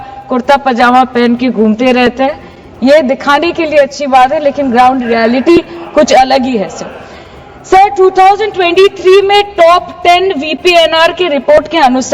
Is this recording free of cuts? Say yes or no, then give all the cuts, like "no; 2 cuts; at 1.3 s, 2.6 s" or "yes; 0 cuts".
yes; 0 cuts